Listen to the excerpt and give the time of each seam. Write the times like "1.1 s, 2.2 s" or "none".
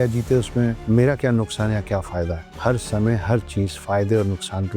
0.8 s, 2.4 s